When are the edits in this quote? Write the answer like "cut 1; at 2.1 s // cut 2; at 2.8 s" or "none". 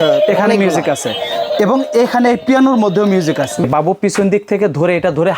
cut 1; at 3.6 s